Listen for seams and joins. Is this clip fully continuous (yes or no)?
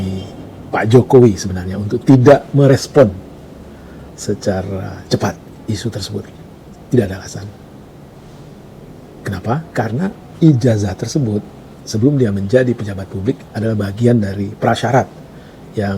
yes